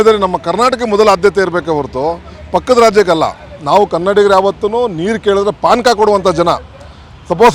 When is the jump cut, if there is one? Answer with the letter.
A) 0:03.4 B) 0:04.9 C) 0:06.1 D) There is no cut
D